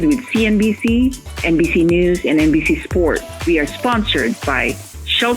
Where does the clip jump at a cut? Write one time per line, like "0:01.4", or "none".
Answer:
0:03.3